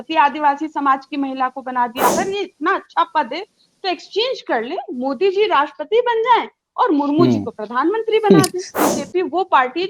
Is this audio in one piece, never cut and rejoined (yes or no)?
no